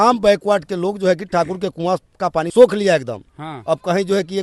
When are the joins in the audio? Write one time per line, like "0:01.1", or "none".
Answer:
0:02.5